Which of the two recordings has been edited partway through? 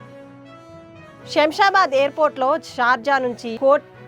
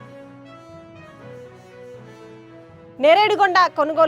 second; 1 cut; at 1.1 s

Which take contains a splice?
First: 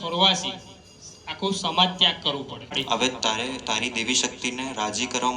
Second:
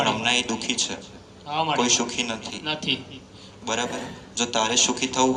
first; 1 cut; at 2.8 s

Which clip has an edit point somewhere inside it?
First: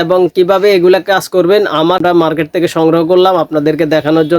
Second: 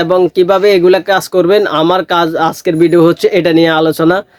first; 1 cut; at 2.0 s

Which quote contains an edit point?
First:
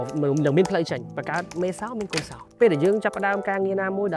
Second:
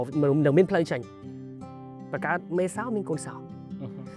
first; 2 cuts; at 1.1 s, 2.4 s

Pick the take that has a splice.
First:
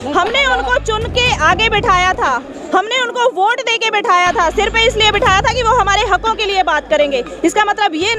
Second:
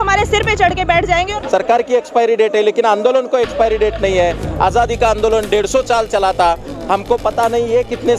second; 1 cut; at 1.4 s

